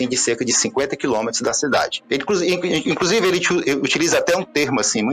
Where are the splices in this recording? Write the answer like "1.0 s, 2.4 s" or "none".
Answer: 1.9 s